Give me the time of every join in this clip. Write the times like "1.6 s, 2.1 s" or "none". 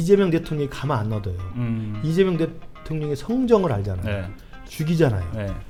none